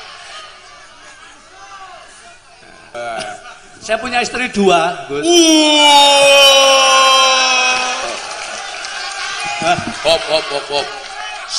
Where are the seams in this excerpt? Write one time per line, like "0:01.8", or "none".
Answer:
0:02.9